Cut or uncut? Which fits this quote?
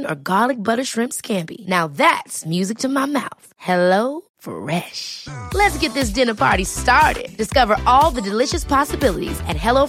uncut